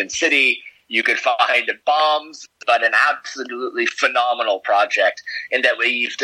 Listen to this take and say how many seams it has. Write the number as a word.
one